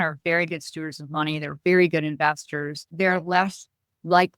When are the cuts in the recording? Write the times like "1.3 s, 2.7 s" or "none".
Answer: 2.9 s